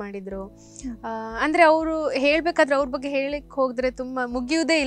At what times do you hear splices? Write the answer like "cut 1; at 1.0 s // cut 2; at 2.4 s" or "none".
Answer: none